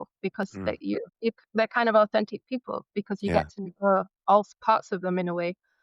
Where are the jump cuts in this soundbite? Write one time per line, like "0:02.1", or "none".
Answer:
none